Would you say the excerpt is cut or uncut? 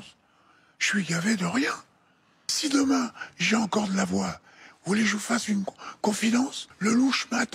cut